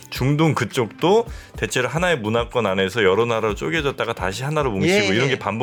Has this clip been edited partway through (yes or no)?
no